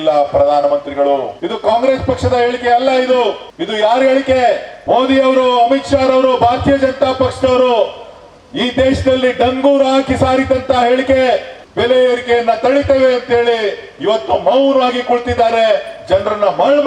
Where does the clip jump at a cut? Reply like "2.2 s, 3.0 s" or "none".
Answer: 1.4 s, 3.5 s, 4.7 s, 11.6 s